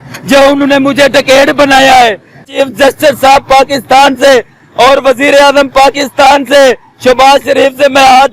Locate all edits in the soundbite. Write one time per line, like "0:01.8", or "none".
0:02.5